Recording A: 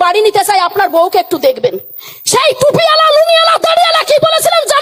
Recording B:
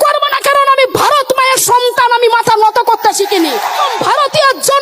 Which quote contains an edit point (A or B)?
B